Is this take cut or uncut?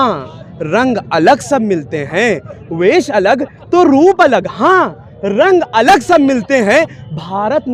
uncut